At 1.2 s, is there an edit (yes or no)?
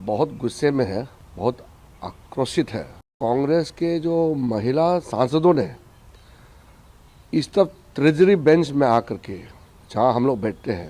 yes